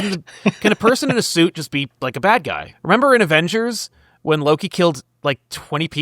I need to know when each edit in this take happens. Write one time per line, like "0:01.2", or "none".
0:02.7